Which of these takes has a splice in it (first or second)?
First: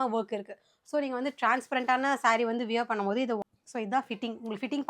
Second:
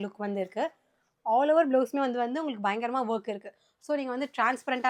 first